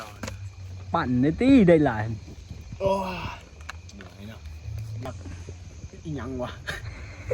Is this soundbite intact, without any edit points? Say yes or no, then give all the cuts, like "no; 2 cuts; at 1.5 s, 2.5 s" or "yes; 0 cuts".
no; 1 cut; at 5.1 s